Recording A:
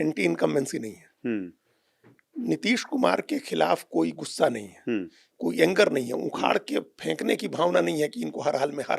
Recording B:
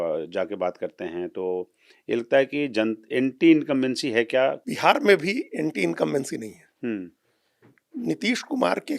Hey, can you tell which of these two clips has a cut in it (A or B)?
B